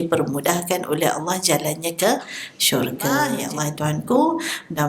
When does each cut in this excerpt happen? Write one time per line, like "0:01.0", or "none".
0:03.4

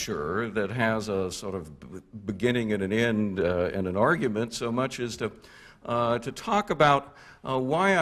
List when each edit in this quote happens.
none

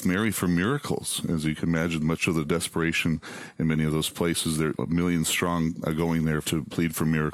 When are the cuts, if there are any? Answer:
0:06.4

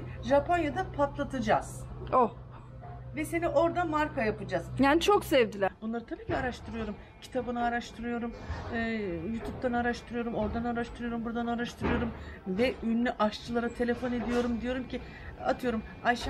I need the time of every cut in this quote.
0:05.7

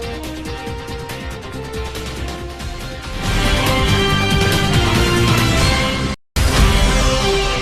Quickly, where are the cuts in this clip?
0:06.2

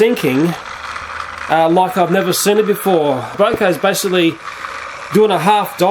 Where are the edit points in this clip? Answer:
0:03.3

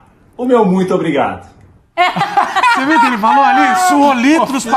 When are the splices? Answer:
none

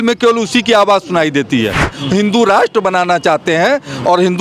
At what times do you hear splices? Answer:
0:01.9

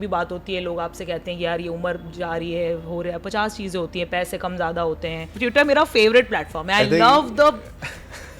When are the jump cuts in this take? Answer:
0:05.4

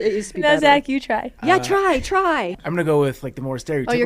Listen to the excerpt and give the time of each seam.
0:01.3
0:02.4

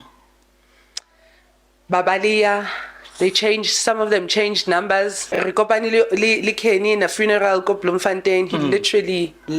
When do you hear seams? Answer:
0:05.2

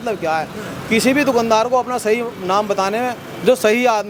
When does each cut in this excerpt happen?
none

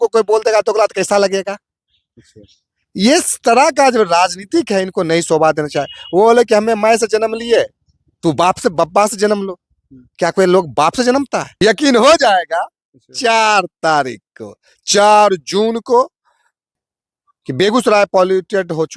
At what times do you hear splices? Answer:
0:11.6
0:16.8

